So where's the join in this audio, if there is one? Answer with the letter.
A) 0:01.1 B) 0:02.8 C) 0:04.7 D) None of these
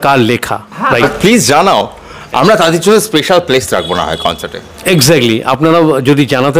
A